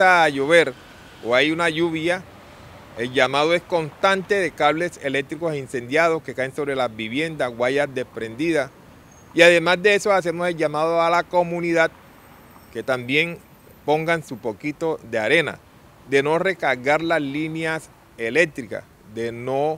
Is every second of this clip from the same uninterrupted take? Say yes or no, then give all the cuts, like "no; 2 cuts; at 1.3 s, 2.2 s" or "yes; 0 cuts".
yes; 0 cuts